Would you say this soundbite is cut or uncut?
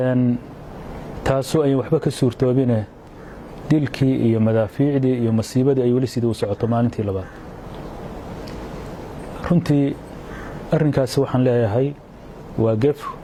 uncut